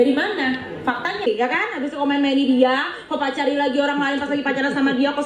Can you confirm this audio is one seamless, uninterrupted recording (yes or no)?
no